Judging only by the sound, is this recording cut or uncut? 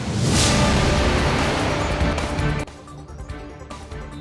uncut